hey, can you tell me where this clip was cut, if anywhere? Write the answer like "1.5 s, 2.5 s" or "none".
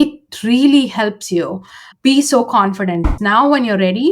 3.1 s